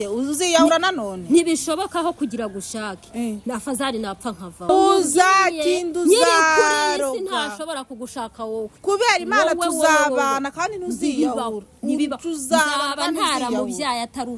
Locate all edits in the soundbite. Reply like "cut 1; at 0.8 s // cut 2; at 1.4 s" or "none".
cut 1; at 4.7 s